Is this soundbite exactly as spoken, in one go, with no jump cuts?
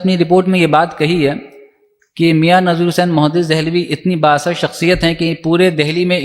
yes; 0 cuts

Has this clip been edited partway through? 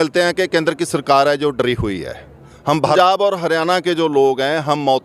yes; 1 cut; at 3.0 s

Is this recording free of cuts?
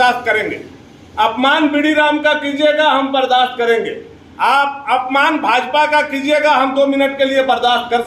yes; 0 cuts

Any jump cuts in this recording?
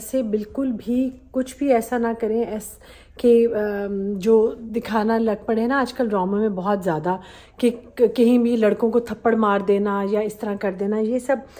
no; 0 cuts

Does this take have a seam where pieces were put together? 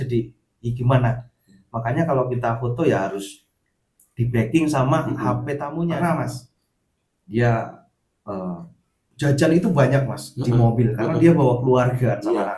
yes; 1 cut; at 5.7 s

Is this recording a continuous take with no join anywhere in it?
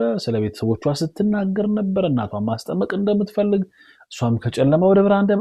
yes; 0 cuts

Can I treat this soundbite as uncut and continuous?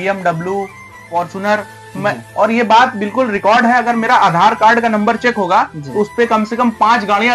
yes; 0 cuts

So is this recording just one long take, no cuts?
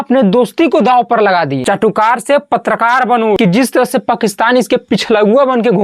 no; 2 cuts; at 1.6 s, 3.4 s

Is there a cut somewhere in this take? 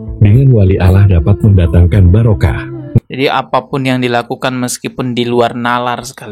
yes; 1 cut; at 3.0 s

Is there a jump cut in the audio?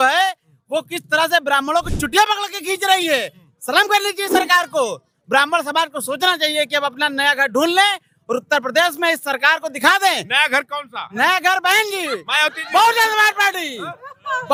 no; 0 cuts

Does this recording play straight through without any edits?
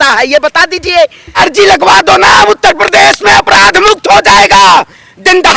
no; 1 cut; at 1.4 s

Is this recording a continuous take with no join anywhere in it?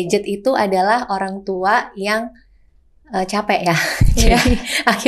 yes; 0 cuts

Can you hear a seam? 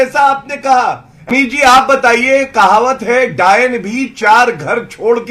yes; 1 cut; at 1.3 s

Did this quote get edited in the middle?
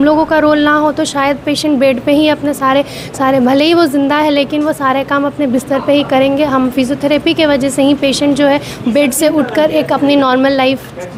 no; 0 cuts

